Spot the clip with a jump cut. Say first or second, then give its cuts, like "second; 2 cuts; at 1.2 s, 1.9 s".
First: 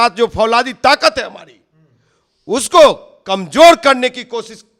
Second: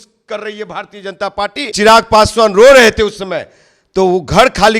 second; 1 cut; at 1.6 s